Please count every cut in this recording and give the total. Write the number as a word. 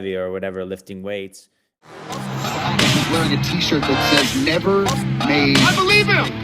one